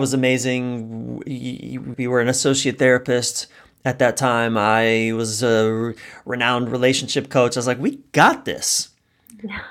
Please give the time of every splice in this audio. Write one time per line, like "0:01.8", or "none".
0:01.9